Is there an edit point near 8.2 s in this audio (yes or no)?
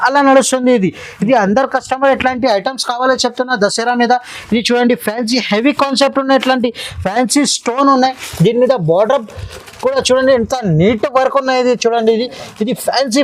no